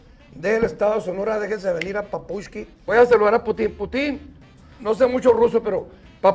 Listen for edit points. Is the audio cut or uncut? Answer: cut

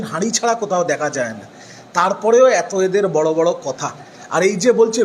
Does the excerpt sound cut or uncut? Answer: uncut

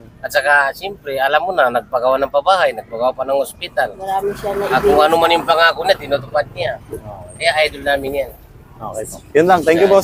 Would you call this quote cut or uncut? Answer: uncut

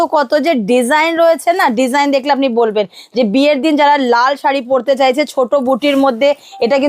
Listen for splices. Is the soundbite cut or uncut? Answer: uncut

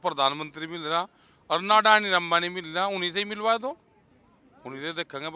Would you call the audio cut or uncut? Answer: uncut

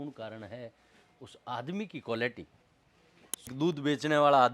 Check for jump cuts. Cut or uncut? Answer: cut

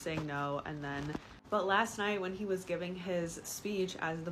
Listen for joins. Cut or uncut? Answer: cut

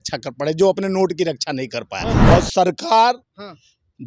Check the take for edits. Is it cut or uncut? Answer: cut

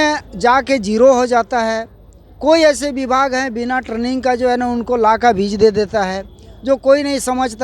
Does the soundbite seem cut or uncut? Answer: cut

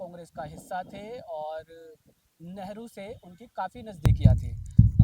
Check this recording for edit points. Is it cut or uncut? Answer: cut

